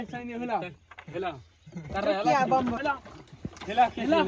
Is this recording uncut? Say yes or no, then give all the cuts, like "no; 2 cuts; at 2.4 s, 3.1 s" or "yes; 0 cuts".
no; 1 cut; at 2.8 s